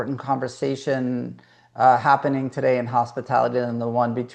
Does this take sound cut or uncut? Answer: uncut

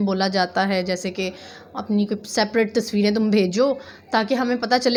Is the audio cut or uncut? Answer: uncut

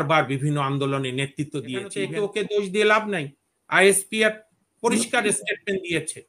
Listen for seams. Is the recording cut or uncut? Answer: cut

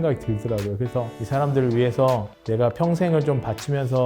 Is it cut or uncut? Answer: cut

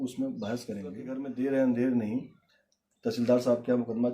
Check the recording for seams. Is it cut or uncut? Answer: cut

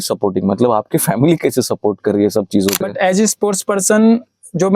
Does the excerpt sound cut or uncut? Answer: cut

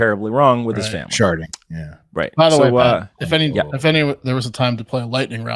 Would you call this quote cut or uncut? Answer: uncut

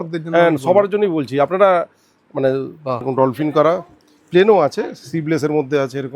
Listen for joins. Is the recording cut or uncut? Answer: cut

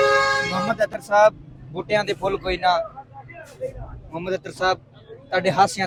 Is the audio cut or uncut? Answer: uncut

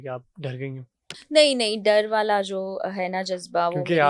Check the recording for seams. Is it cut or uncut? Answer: uncut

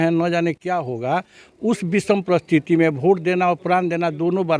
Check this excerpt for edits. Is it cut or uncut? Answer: uncut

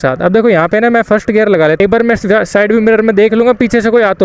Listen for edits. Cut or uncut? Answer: cut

